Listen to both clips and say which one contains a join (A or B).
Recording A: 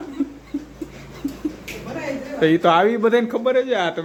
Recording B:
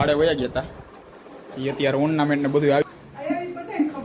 B